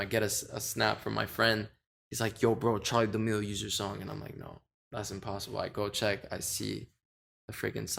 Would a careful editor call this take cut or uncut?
uncut